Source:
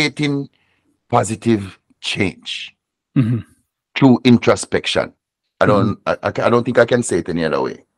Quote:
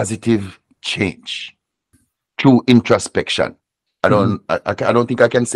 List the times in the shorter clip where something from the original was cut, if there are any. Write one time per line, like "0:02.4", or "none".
0:01.9